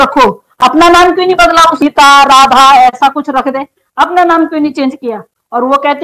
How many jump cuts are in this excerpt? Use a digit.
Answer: 0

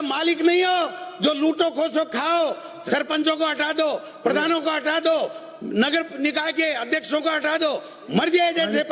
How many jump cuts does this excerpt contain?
0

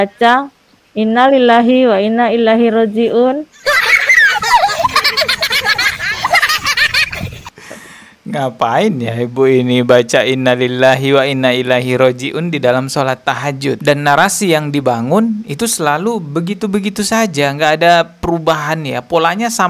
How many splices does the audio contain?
0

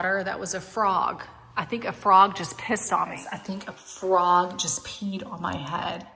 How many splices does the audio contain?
1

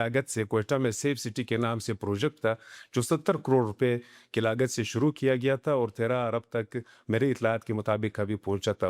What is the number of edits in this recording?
0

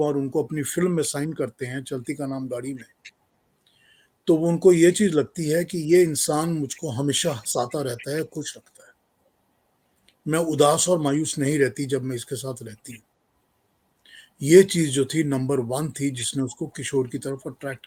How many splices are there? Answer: 0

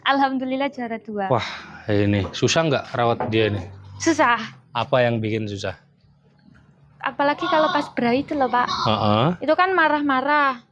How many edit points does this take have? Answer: 1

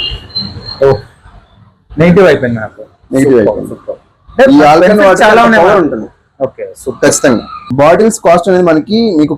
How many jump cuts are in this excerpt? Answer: 1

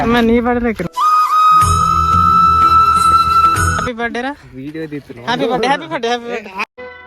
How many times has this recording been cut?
1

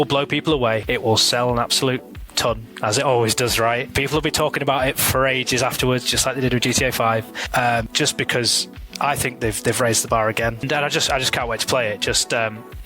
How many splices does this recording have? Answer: 3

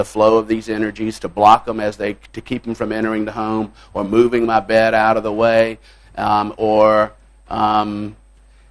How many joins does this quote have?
0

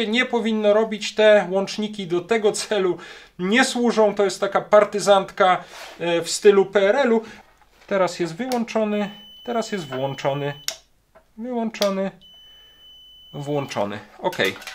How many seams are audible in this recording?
1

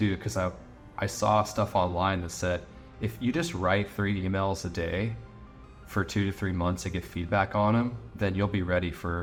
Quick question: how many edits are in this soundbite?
0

